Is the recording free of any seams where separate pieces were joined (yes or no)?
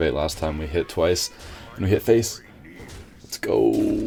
yes